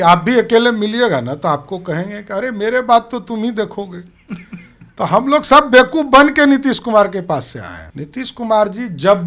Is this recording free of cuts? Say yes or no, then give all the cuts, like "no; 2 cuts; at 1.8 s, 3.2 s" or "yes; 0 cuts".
yes; 0 cuts